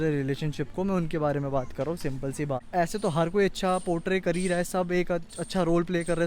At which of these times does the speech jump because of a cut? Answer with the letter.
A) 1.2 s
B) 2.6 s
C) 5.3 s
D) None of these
B